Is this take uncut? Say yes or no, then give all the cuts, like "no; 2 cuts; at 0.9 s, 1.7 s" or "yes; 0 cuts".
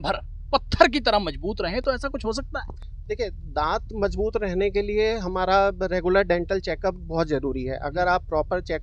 yes; 0 cuts